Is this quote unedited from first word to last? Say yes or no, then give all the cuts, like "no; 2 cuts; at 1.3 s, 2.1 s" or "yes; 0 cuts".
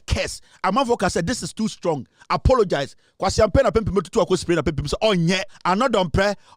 no; 1 cut; at 5.5 s